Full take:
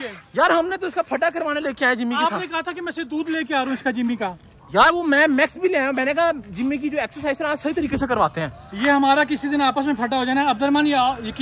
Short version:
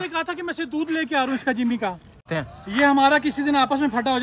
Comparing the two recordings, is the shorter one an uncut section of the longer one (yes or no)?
no